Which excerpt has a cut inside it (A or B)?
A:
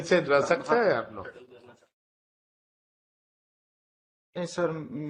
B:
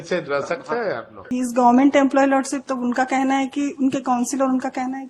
B